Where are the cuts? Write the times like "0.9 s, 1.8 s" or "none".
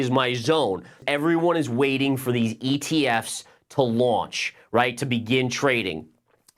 1.0 s